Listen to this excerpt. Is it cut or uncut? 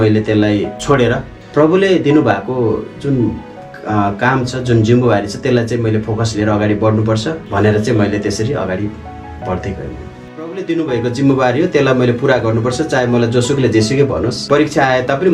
cut